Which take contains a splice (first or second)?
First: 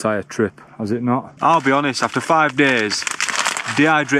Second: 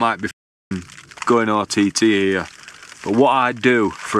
first